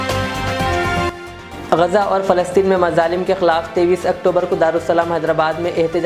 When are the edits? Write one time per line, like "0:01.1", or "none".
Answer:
0:01.0